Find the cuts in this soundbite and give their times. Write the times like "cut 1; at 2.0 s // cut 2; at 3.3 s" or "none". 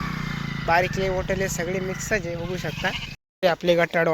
cut 1; at 3.1 s